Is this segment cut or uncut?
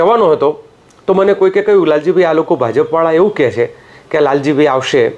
uncut